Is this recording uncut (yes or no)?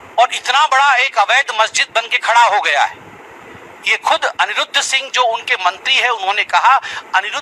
yes